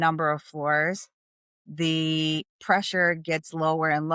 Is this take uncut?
yes; 0 cuts

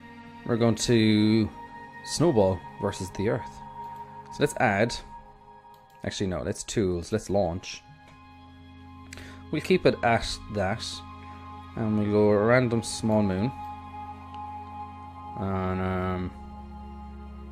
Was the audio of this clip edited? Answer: yes; 1 cut; at 3.1 s

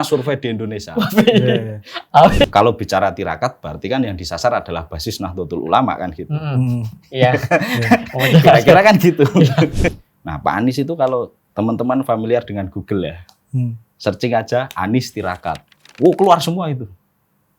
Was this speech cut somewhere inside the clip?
yes; 3 cuts; at 2.4 s, 10.1 s, 11.4 s

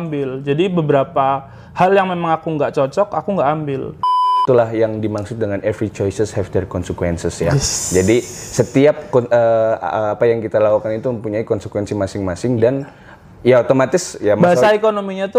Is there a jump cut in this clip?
yes; 1 cut; at 4.2 s

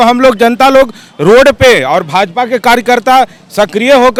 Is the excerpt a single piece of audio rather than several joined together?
yes; 0 cuts

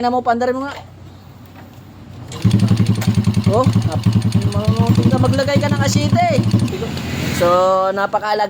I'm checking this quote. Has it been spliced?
yes; 1 cut; at 6.7 s

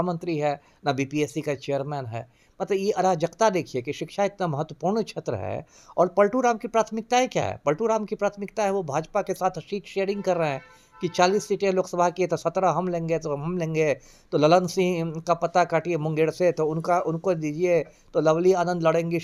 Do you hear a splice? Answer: no; 0 cuts

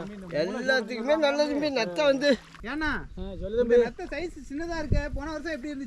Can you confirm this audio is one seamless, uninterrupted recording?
no; 1 cut; at 2.7 s

